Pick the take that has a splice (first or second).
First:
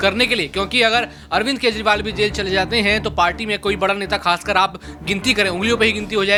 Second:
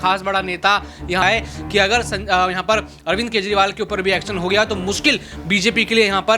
second